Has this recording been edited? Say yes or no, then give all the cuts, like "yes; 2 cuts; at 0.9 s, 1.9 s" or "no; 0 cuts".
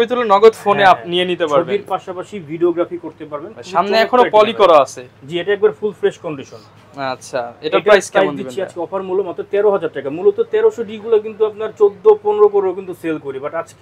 no; 0 cuts